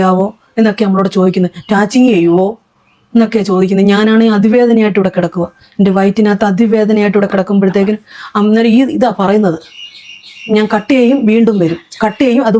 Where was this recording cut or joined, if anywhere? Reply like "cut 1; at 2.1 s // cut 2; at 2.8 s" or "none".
none